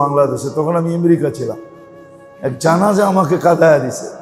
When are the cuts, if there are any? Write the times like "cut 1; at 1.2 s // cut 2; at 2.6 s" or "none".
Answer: none